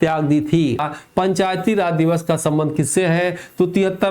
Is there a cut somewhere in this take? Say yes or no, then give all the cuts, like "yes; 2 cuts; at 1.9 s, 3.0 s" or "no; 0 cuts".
yes; 1 cut; at 0.9 s